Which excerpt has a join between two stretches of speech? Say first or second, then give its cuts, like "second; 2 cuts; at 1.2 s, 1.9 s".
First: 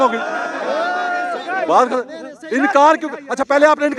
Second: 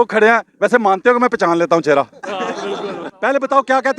second; 1 cut; at 3.1 s